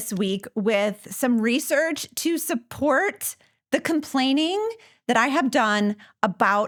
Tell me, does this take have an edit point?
no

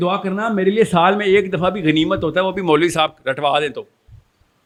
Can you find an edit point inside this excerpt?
no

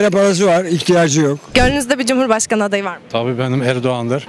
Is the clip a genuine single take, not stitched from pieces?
no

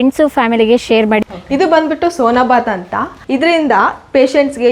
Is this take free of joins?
no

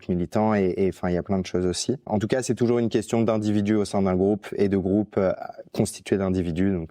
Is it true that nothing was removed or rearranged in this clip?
yes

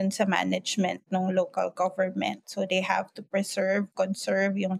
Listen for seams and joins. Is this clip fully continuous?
yes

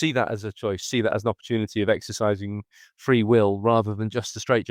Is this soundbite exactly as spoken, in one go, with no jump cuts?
yes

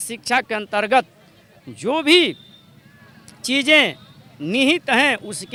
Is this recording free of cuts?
yes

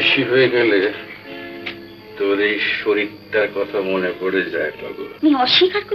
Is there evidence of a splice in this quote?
yes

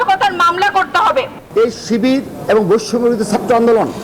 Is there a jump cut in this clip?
yes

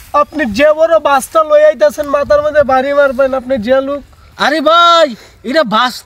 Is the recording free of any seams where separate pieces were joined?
yes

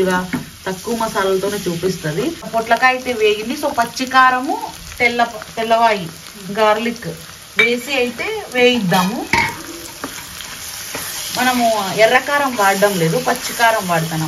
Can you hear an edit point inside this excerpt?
yes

